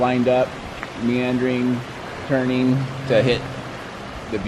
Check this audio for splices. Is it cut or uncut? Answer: uncut